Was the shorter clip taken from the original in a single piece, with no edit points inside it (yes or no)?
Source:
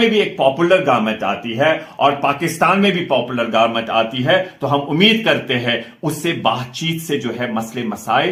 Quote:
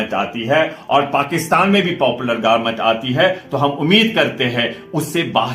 yes